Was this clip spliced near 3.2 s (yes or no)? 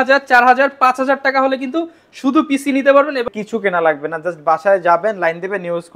yes